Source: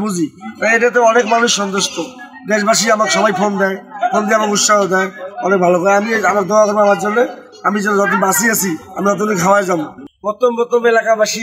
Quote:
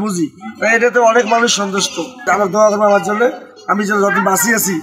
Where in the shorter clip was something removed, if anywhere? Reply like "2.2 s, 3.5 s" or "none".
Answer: 2.2 s